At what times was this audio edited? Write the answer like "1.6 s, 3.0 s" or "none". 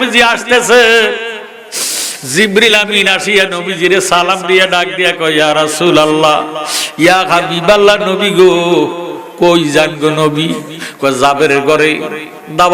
none